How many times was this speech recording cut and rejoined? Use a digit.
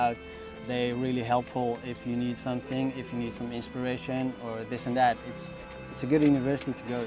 0